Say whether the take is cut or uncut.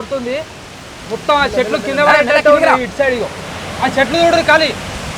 uncut